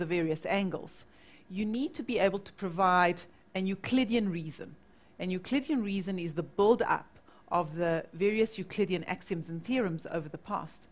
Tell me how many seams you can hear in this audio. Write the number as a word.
zero